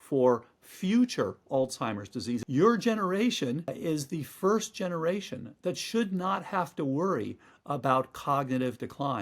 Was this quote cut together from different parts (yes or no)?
yes